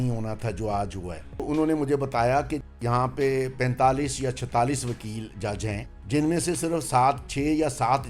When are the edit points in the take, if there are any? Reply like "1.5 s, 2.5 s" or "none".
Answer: 1.4 s, 2.6 s, 5.9 s